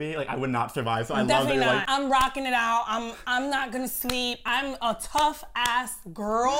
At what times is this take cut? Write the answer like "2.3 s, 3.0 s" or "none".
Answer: 1.8 s, 4.4 s

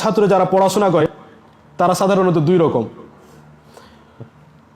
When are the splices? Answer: 1.0 s

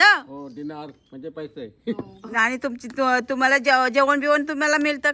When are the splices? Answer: 2.1 s

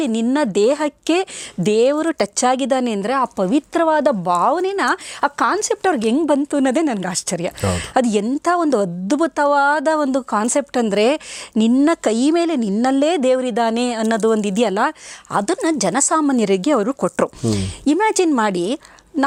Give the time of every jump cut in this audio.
none

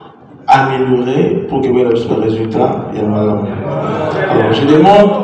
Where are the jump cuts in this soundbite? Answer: none

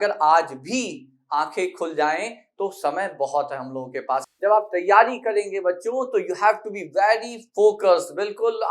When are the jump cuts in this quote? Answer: 4.3 s

